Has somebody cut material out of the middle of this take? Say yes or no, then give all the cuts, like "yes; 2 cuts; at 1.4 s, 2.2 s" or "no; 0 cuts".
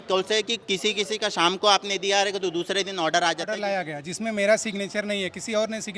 yes; 1 cut; at 3.6 s